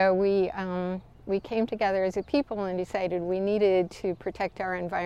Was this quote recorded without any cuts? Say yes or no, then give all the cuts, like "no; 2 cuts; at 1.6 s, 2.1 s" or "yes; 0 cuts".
yes; 0 cuts